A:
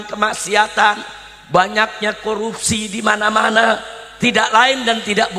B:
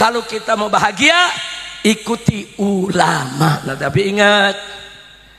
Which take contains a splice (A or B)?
B